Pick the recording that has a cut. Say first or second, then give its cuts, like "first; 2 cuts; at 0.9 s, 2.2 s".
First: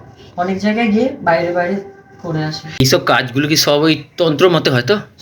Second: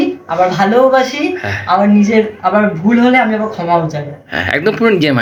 first; 1 cut; at 2.8 s